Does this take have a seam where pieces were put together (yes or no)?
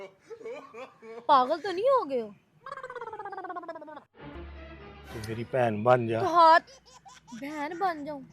yes